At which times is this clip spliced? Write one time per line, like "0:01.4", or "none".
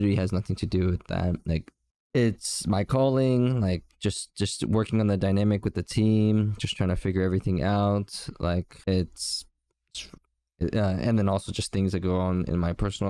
none

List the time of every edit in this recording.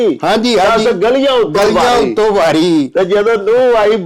none

